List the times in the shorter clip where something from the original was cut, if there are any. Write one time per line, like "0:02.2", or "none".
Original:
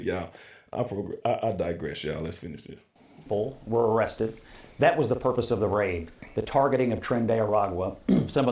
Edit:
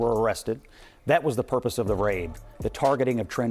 none